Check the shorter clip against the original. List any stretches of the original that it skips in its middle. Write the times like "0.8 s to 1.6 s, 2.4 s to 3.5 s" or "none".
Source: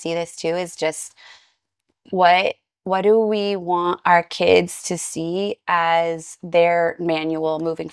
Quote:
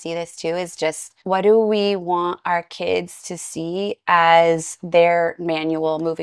1.1 s to 2.7 s